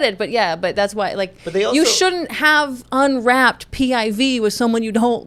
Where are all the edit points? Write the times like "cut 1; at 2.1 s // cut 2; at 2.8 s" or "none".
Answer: none